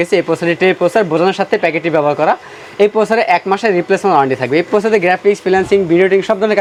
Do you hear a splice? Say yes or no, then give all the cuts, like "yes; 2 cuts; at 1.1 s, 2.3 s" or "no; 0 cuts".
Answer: no; 0 cuts